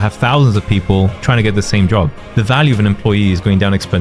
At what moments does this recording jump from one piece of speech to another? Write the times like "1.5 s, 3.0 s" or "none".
2.2 s